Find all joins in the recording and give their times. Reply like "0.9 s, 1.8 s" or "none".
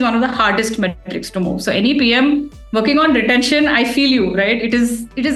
none